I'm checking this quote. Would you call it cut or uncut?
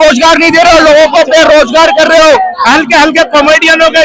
cut